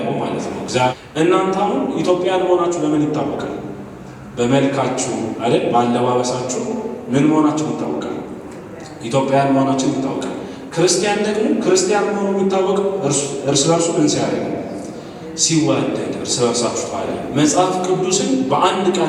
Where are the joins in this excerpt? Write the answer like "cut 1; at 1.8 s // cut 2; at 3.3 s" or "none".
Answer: cut 1; at 0.9 s // cut 2; at 17.2 s